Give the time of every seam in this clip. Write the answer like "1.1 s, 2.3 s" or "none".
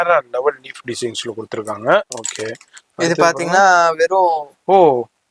none